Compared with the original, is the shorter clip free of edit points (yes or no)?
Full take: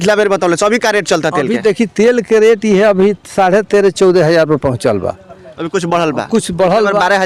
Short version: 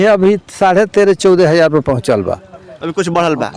yes